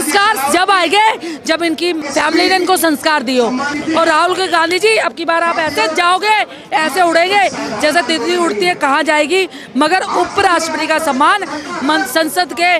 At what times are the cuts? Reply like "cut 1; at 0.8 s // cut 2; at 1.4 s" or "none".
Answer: cut 1; at 2.0 s // cut 2; at 3.7 s